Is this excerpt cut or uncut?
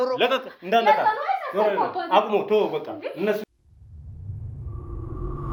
uncut